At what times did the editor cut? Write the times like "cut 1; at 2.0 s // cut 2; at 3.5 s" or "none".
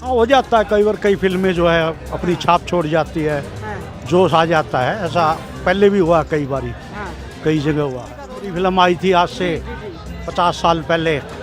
cut 1; at 8.4 s